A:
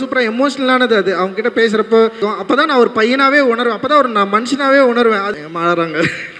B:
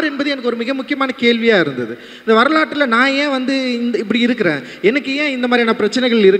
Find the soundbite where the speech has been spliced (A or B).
A